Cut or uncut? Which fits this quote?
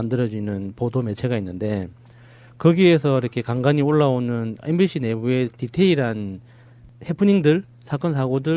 cut